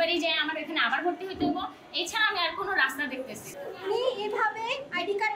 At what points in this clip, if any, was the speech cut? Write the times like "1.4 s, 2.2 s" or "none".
3.4 s

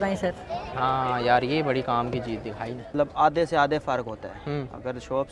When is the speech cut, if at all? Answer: 2.9 s

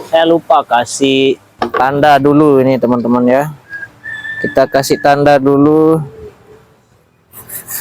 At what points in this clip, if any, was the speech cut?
1.5 s

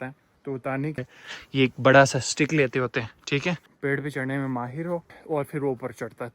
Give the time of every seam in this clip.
1.0 s, 3.7 s, 5.2 s

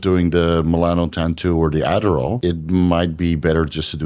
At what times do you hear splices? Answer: 2.4 s

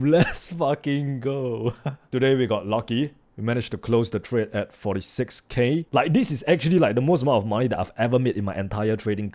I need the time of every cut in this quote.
2.0 s, 5.9 s

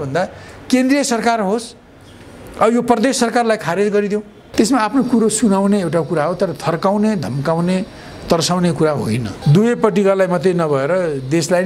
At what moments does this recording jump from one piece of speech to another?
4.4 s, 9.3 s

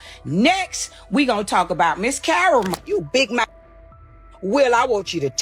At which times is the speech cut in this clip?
2.7 s

